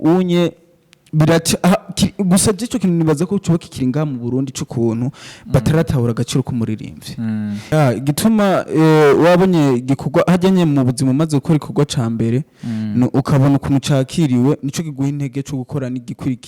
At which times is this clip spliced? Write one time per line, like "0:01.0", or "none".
0:07.7